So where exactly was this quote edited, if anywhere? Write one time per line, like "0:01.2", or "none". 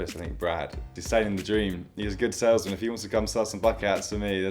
0:01.0